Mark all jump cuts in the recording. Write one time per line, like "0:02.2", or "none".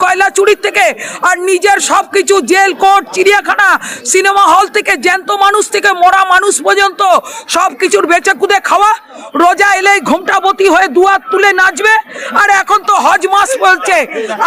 none